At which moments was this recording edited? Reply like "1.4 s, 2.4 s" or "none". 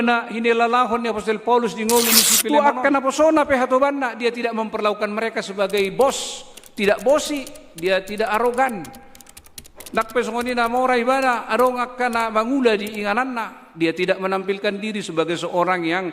2.3 s